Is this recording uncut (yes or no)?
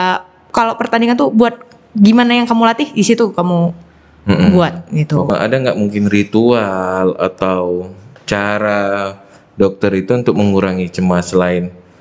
no